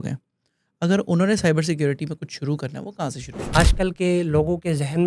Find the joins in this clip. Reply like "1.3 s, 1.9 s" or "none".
3.4 s